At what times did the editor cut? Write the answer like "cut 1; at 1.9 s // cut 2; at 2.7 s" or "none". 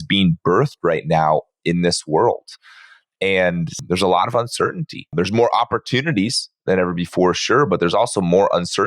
cut 1; at 3.8 s // cut 2; at 5.1 s